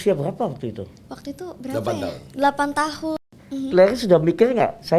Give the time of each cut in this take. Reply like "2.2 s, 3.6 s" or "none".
3.2 s